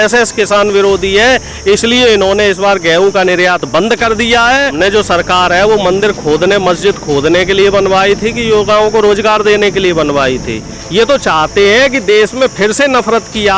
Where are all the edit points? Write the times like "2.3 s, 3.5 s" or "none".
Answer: 4.7 s, 10.8 s